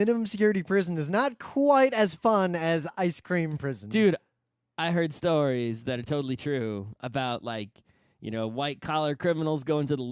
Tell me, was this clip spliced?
yes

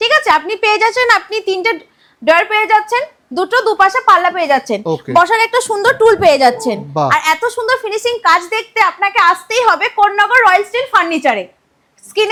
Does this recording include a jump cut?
no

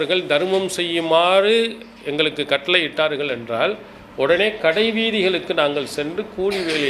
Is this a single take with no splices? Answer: yes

